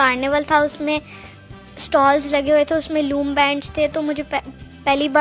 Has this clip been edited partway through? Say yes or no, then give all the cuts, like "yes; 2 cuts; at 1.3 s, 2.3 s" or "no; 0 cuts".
no; 0 cuts